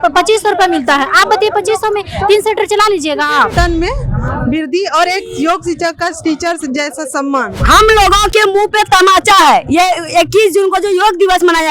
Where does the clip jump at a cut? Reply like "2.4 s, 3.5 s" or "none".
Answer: 3.5 s, 7.5 s